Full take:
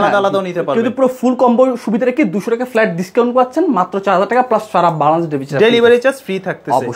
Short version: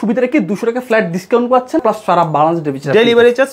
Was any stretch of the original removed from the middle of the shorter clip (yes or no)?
yes